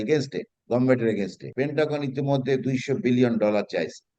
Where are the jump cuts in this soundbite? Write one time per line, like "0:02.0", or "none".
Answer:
0:01.4